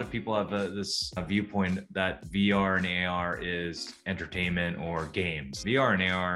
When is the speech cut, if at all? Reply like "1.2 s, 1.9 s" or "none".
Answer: 1.2 s, 5.5 s

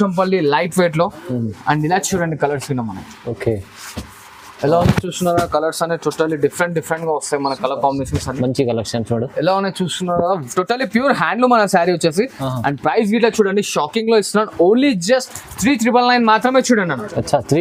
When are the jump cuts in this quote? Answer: none

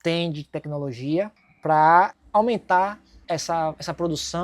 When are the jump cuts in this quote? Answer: 1.4 s, 2.2 s, 3.1 s

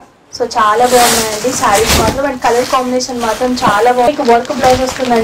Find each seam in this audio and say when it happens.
4.1 s

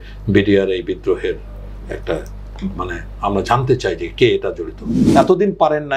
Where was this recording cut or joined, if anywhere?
4.9 s

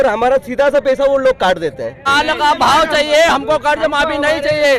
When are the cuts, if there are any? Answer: 2.1 s

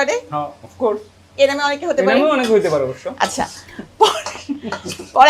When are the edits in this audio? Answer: none

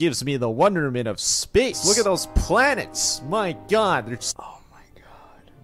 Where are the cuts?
1.8 s, 4.3 s

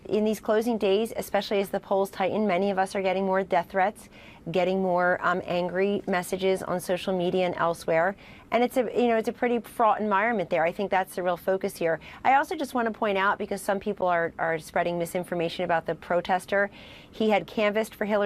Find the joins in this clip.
none

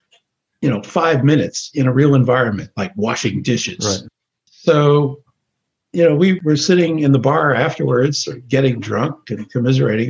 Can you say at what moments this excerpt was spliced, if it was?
6.4 s

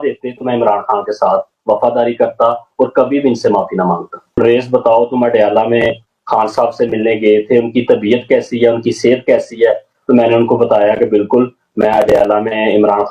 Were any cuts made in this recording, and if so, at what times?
4.4 s

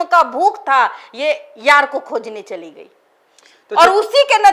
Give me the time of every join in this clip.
none

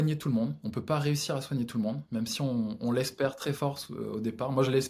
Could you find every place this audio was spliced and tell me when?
none

